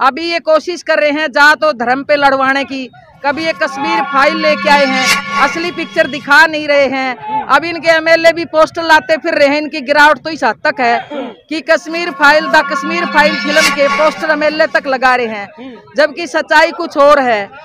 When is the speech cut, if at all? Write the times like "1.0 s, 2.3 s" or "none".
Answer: none